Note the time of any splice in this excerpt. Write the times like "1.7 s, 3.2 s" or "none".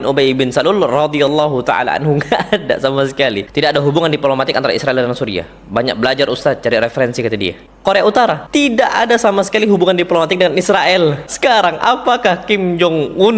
3.4 s, 7.6 s, 8.4 s, 11.3 s